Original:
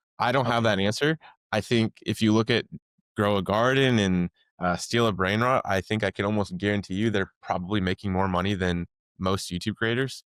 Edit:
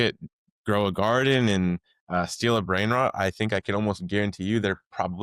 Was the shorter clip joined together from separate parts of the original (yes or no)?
no